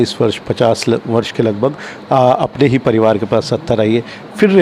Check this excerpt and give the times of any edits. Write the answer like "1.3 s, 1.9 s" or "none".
none